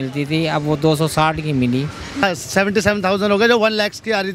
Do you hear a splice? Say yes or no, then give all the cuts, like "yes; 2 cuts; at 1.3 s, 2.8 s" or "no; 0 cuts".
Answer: yes; 1 cut; at 2.2 s